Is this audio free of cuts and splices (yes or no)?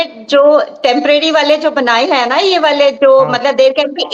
yes